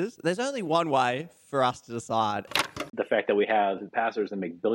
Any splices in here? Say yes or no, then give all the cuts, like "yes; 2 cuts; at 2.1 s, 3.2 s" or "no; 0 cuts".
yes; 2 cuts; at 2.5 s, 3.9 s